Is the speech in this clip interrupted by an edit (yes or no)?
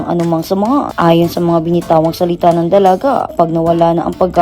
yes